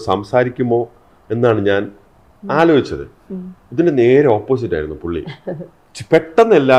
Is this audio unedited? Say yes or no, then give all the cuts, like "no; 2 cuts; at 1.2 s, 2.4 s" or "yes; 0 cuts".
yes; 0 cuts